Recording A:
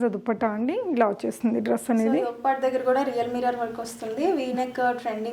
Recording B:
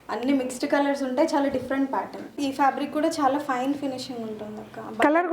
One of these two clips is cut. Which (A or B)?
B